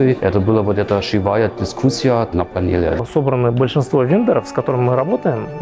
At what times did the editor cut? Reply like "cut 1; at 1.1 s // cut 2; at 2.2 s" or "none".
cut 1; at 3.0 s